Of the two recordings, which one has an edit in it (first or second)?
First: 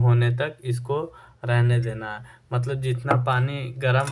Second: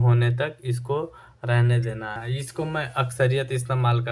second